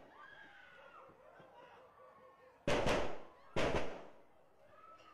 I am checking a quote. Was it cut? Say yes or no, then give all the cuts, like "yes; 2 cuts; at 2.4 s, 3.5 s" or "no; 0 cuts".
yes; 1 cut; at 1.0 s